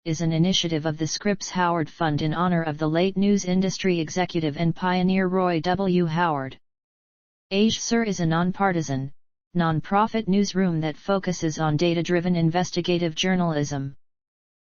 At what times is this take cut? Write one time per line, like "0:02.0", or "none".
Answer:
none